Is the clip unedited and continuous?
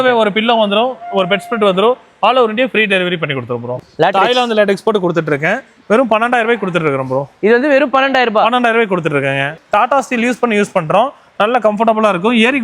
no; 2 cuts; at 3.8 s, 9.6 s

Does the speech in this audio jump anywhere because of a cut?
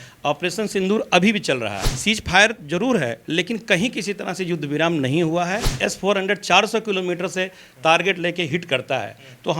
yes; 2 cuts; at 1.9 s, 5.7 s

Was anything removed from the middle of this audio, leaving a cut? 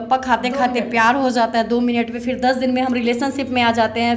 no; 0 cuts

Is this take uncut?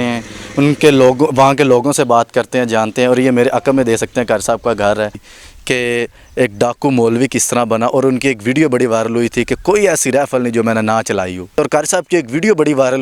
no; 2 cuts; at 5.3 s, 11.6 s

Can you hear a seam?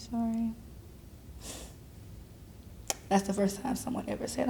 yes; 1 cut; at 2.7 s

